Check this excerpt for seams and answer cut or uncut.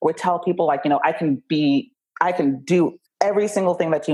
uncut